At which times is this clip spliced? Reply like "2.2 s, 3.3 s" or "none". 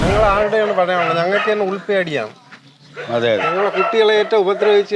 none